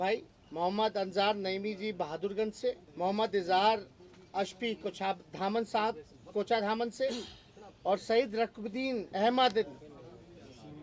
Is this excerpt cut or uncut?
cut